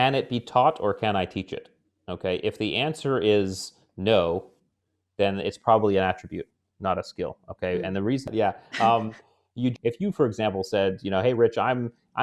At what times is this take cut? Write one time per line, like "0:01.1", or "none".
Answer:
0:08.3
0:09.7